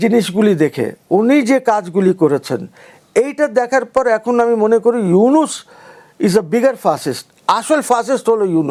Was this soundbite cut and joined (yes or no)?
no